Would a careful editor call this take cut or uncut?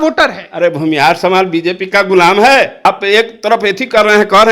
cut